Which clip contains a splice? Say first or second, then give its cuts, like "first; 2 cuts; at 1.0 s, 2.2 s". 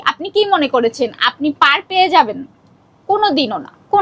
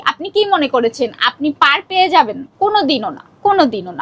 second; 1 cut; at 2.4 s